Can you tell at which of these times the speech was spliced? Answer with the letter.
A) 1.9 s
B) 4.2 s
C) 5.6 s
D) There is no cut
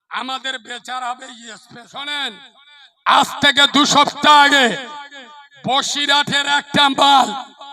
A